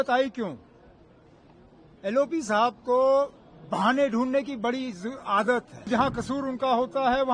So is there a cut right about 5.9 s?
yes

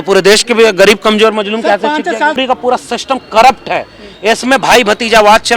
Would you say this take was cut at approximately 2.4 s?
yes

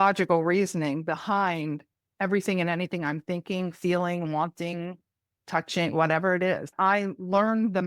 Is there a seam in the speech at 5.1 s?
no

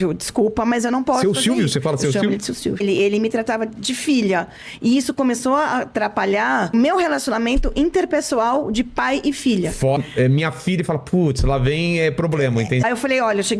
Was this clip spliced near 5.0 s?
no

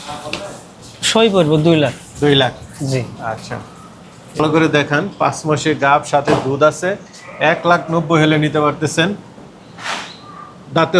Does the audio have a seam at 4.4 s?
yes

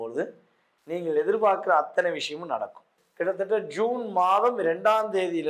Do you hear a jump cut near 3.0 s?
yes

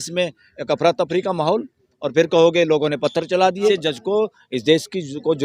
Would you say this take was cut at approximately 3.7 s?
yes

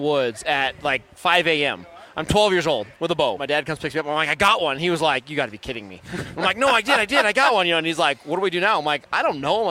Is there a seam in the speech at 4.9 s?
no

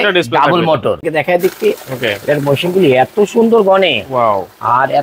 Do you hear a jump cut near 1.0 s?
yes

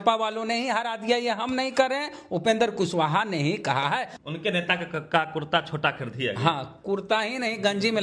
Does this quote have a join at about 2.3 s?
no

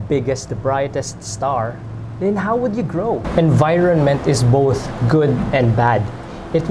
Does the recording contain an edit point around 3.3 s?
yes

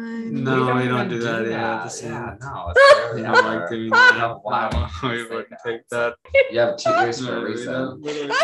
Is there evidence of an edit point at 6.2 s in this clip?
yes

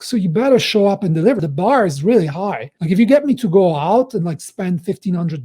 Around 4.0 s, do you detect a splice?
no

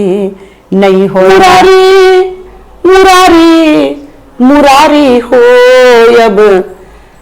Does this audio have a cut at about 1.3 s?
yes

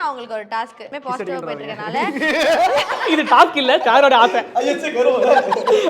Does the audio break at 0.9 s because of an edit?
yes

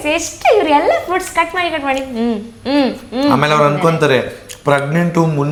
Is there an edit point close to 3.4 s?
no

